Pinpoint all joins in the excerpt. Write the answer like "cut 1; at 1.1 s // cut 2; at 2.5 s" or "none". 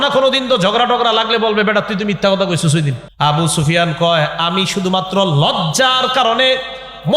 cut 1; at 3.0 s